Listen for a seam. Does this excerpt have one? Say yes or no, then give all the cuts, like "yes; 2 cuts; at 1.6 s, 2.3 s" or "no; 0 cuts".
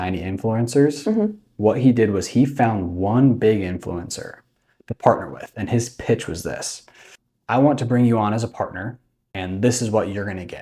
no; 0 cuts